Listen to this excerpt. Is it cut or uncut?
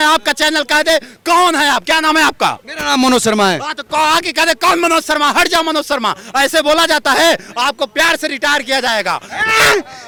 uncut